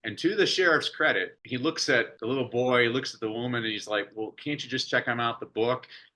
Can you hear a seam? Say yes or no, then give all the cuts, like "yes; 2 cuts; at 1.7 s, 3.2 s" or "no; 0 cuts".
yes; 2 cuts; at 1.4 s, 2.1 s